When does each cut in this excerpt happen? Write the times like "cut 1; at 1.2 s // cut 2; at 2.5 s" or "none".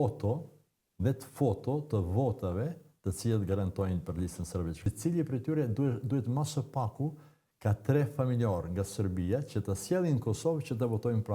cut 1; at 4.9 s